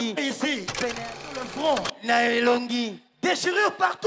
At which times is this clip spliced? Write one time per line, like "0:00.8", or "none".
0:01.1